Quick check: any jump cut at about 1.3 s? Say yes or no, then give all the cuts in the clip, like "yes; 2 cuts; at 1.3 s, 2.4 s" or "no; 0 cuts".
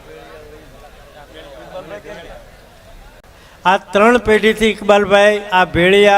no; 1 cut; at 3.3 s